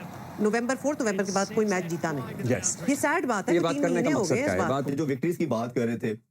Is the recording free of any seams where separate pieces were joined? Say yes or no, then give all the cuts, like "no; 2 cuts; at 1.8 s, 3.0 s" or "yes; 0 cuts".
no; 1 cut; at 4.9 s